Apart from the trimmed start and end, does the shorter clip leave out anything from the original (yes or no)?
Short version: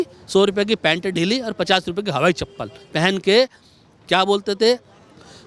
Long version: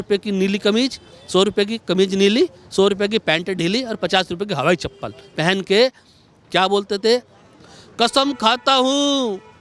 no